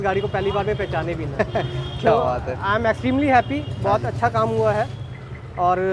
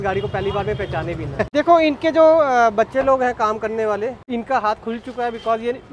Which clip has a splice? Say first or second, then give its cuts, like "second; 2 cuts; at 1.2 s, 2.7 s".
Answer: second; 2 cuts; at 1.5 s, 4.2 s